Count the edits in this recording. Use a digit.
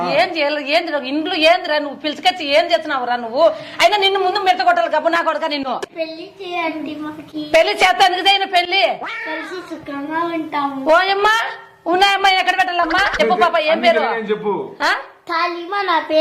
2